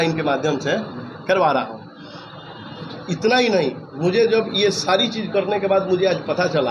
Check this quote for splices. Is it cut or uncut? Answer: uncut